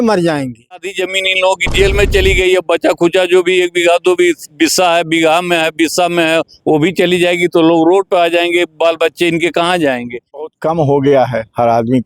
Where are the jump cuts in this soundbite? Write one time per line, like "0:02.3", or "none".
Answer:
0:00.9
0:10.4